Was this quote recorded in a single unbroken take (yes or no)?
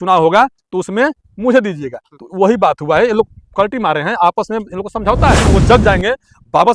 no